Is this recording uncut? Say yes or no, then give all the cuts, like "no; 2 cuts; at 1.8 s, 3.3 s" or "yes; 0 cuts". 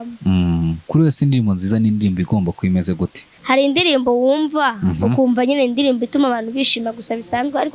no; 2 cuts; at 0.8 s, 3.3 s